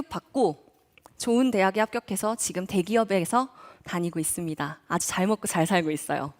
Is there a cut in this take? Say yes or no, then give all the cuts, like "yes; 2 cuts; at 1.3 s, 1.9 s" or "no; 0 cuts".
no; 0 cuts